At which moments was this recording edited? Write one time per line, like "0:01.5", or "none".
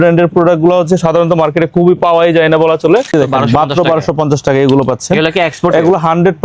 0:03.1